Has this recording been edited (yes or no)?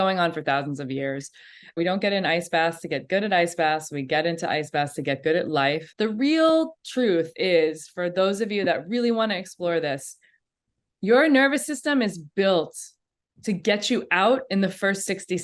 yes